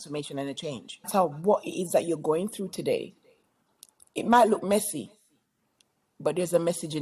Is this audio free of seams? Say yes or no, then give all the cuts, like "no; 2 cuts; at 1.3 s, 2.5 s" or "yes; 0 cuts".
no; 1 cut; at 1.1 s